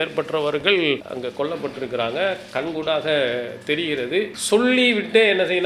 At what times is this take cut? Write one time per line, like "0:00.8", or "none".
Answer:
0:01.1
0:04.4